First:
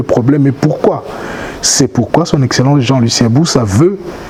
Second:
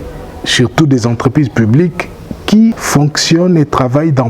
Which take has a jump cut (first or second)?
second